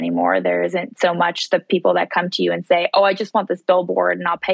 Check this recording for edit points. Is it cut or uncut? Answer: uncut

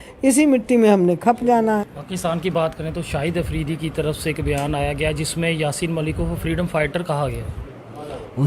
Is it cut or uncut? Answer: cut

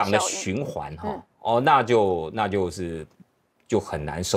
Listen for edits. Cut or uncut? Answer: uncut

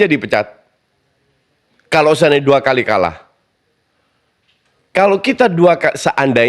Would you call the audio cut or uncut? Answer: uncut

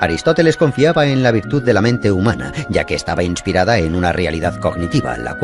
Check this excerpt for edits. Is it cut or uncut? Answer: uncut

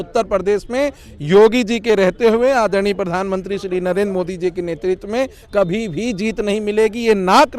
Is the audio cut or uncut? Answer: uncut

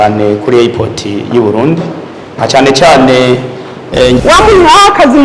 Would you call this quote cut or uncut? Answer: cut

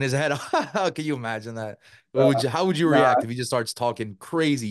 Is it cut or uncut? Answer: uncut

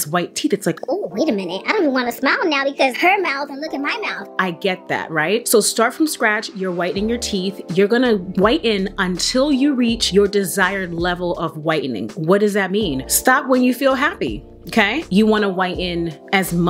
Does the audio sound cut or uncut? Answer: uncut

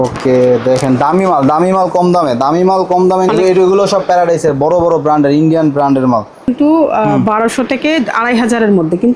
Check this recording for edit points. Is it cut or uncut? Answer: cut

